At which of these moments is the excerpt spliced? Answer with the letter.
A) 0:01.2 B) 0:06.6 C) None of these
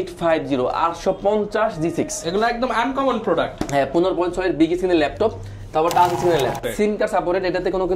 B